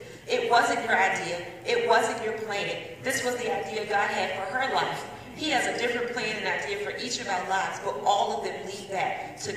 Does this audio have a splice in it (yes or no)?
no